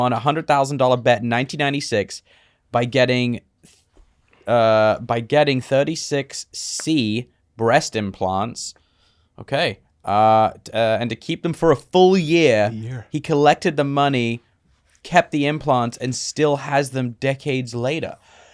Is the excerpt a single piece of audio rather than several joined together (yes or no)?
yes